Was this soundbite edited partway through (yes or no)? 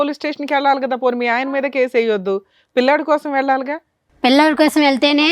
no